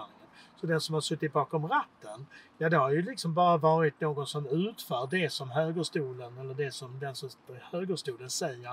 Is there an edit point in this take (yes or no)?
no